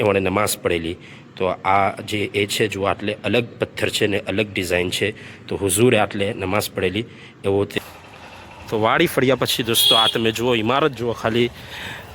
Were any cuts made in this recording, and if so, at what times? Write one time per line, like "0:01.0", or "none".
0:07.8